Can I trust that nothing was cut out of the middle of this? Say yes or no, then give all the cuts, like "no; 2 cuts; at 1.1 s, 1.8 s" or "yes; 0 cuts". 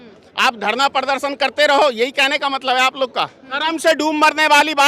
no; 1 cut; at 3.5 s